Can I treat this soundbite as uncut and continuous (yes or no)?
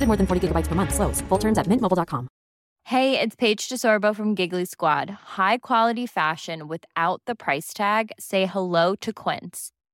no